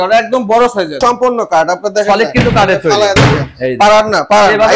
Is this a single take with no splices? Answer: no; 1 cut; at 1.0 s

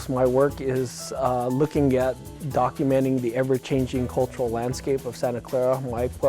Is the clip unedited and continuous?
no; 1 cut; at 2.3 s

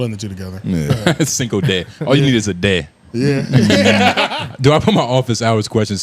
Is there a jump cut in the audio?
yes; 1 cut; at 4.4 s

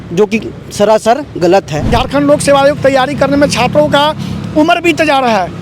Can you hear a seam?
yes; 1 cut; at 1.8 s

